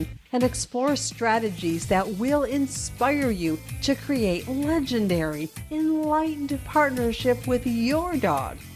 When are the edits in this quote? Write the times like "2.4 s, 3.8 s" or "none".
none